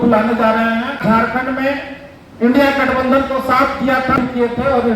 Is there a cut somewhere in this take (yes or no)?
yes